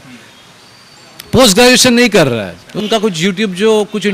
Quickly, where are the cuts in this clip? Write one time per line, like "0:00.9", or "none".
0:02.8